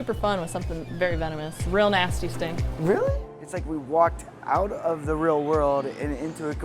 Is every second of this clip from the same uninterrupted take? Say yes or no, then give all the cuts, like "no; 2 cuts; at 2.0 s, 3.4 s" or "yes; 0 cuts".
no; 2 cuts; at 1.6 s, 3.3 s